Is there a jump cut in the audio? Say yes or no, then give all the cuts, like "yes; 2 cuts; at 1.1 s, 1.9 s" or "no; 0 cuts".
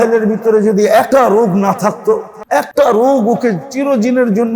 yes; 2 cuts; at 1.1 s, 2.6 s